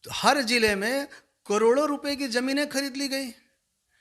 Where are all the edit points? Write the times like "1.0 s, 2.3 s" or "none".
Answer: none